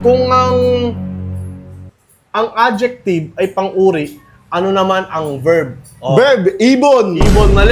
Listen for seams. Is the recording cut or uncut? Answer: uncut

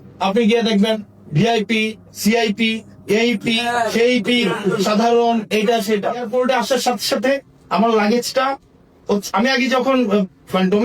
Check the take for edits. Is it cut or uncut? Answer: cut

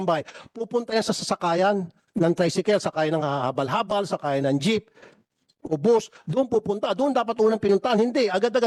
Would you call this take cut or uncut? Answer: uncut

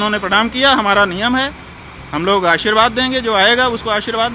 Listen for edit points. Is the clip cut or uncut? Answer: uncut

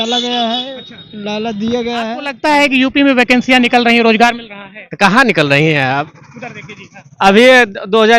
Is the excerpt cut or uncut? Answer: cut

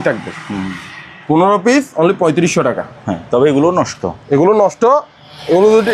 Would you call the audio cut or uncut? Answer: uncut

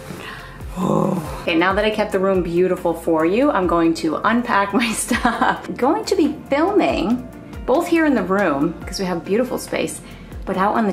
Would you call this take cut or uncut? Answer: cut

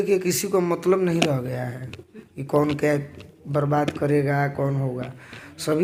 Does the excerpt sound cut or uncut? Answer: uncut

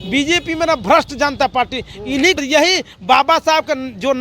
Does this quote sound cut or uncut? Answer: cut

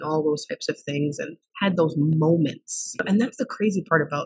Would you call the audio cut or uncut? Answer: cut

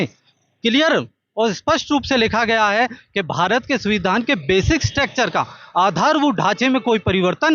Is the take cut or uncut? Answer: uncut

